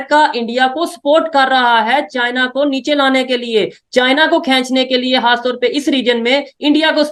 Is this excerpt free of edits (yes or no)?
yes